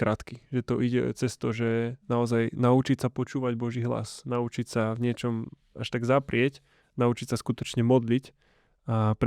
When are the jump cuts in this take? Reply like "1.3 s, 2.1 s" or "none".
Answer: none